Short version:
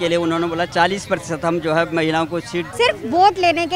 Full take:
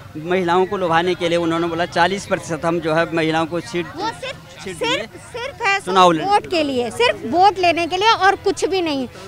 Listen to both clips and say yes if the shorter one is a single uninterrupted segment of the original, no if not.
no